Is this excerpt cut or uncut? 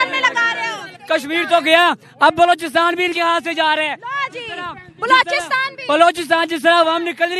cut